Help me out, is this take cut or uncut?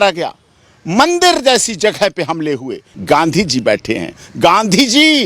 cut